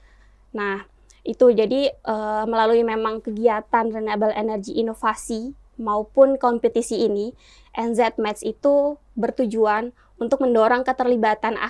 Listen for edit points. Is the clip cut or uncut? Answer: uncut